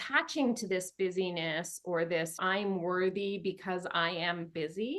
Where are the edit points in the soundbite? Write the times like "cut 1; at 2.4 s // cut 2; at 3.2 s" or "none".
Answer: cut 1; at 2.4 s